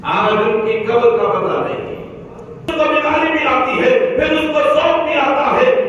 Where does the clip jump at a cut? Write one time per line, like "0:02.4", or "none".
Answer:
0:02.7